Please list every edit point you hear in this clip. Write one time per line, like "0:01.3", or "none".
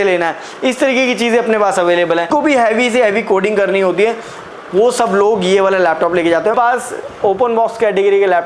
0:02.3
0:06.5